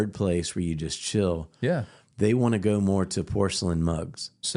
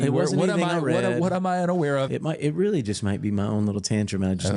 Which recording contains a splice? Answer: second; 1 cut; at 2.1 s

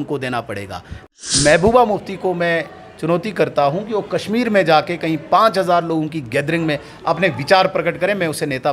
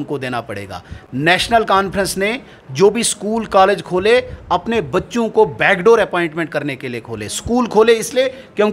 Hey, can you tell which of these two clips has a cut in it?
first; 1 cut; at 1.0 s

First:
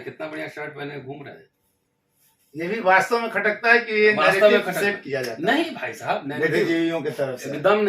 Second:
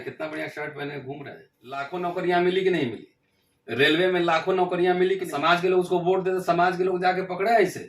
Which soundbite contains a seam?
second; 2 cuts; at 1.9 s, 5.3 s

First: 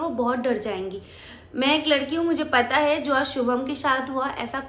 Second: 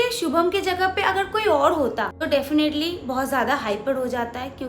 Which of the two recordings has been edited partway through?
second; 1 cut; at 2.2 s

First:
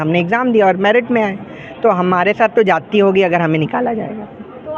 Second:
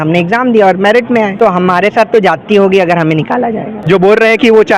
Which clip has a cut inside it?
second; 2 cuts; at 1.3 s, 3.7 s

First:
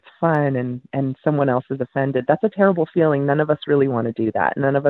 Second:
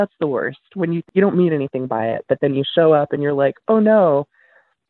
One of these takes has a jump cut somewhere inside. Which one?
second; 1 cut; at 1.0 s

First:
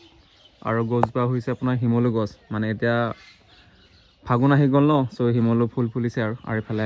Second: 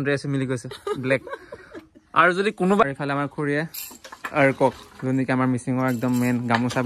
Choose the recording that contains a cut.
second; 1 cut; at 2.8 s

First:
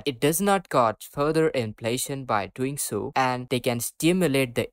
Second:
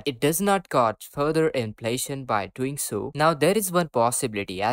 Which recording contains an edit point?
first; 1 cut; at 3.1 s

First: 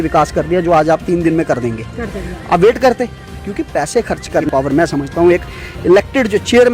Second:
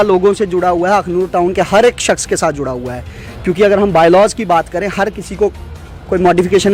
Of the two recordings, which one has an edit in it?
first; 1 cut; at 4.5 s

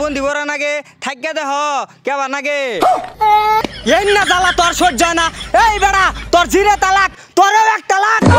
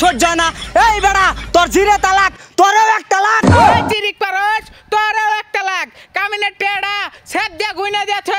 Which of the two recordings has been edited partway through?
first; 1 cut; at 3.7 s

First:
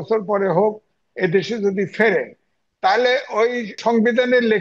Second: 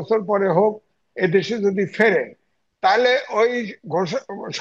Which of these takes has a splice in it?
first; 1 cut; at 3.7 s

